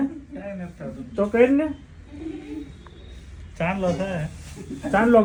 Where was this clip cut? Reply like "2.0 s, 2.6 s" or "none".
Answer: none

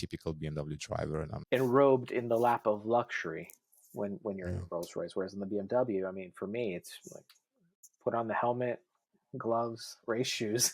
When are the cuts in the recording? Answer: 1.4 s

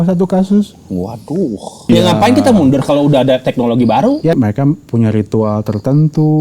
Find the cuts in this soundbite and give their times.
1.9 s, 4.3 s

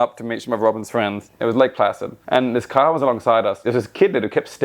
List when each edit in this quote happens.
1.3 s, 2.1 s, 3.6 s

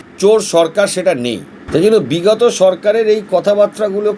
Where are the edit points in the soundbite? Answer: 1.5 s

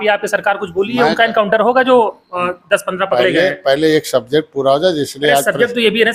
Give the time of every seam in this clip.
none

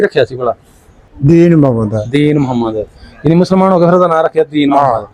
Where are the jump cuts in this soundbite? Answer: 1.1 s

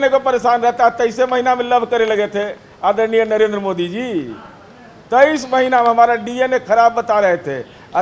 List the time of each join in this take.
none

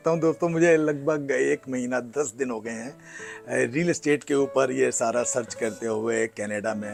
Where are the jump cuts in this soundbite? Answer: none

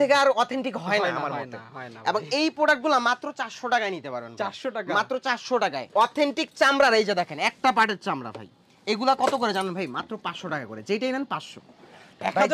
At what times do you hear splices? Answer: 5.8 s

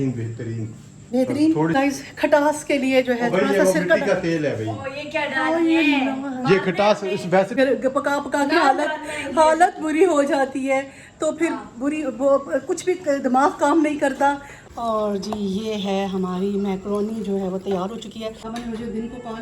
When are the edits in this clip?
1.8 s, 7.5 s, 14.6 s, 18.4 s

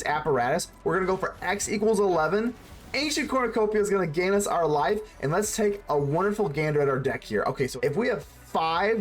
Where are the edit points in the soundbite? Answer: 7.7 s

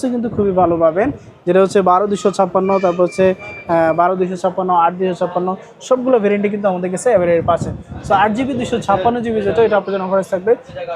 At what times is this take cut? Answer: none

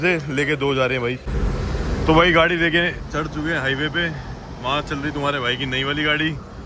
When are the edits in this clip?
1.3 s

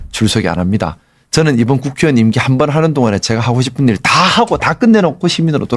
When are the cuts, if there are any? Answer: none

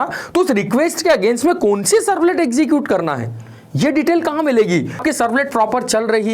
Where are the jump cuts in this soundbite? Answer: 5.0 s

